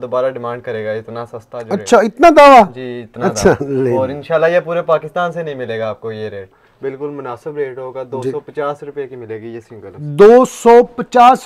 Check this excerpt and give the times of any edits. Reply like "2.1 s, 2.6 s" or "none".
6.5 s

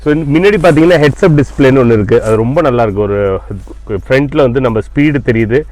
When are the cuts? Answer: none

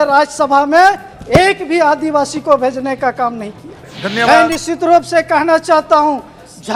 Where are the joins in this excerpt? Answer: 3.9 s

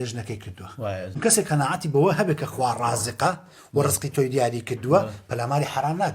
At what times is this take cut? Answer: 1.1 s

